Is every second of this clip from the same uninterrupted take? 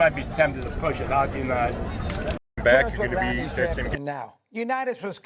no; 1 cut; at 3.9 s

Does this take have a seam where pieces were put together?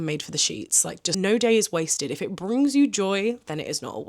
yes; 1 cut; at 1.1 s

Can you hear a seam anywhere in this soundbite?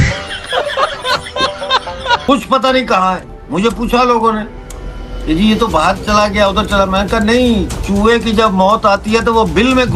yes; 1 cut; at 2.2 s

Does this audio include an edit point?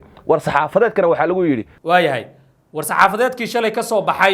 yes; 1 cut; at 1.8 s

